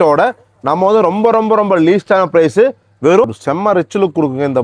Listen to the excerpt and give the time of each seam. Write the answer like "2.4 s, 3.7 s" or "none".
3.2 s